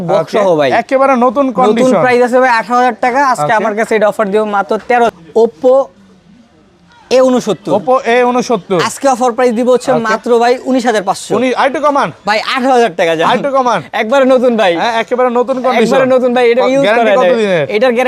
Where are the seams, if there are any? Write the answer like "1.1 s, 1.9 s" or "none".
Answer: 5.1 s